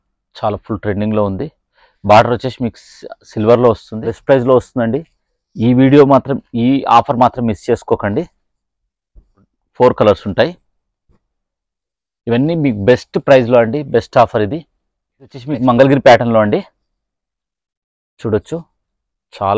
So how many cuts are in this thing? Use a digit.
3